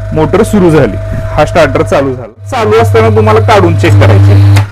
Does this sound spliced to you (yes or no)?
yes